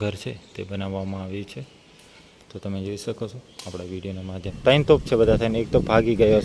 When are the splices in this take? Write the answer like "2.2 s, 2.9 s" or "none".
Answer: 4.5 s